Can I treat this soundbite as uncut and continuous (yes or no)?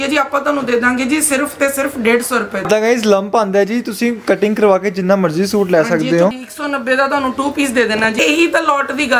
no